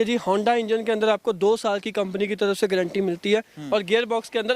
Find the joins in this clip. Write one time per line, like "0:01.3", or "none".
none